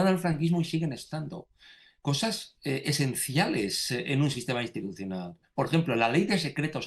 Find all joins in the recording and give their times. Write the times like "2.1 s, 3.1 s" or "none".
none